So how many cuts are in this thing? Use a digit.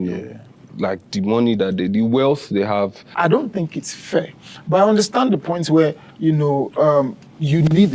1